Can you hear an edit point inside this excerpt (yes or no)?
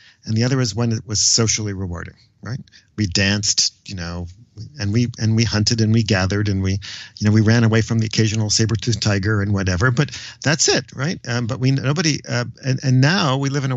no